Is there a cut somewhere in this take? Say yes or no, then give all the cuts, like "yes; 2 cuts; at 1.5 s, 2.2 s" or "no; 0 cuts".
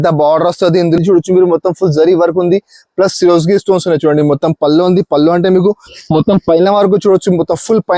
yes; 1 cut; at 1.0 s